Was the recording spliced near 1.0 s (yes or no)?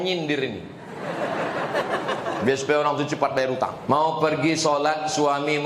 no